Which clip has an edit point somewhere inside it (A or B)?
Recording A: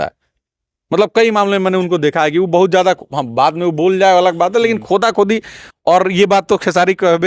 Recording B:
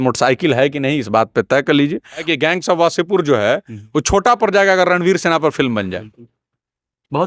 B